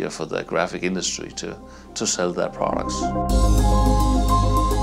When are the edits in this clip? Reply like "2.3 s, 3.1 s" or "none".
2.9 s